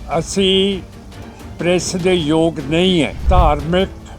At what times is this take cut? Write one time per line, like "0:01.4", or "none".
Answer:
0:03.2